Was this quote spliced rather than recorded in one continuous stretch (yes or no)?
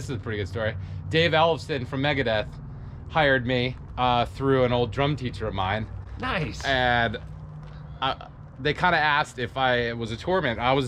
no